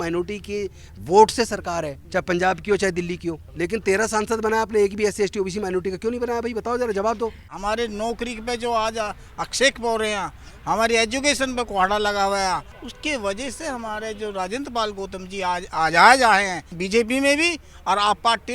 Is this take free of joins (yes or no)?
no